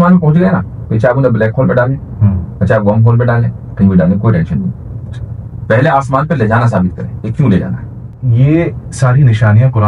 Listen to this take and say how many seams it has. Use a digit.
1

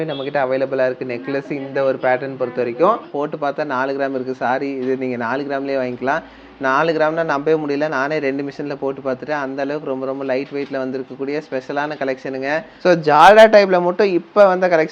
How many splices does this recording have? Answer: 2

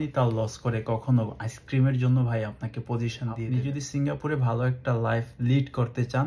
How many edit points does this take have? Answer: 1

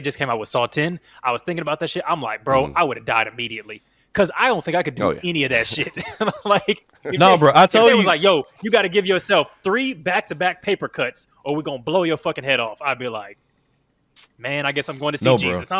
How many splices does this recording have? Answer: 0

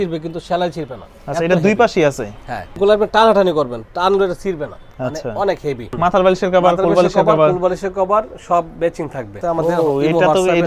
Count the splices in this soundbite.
3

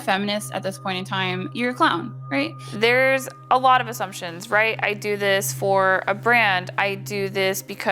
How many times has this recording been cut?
0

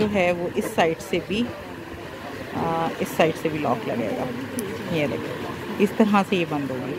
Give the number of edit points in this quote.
0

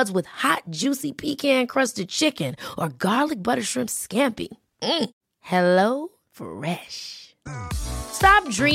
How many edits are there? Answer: 0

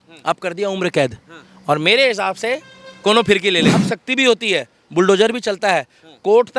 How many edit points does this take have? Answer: 1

